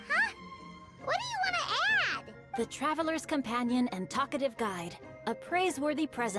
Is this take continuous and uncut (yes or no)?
yes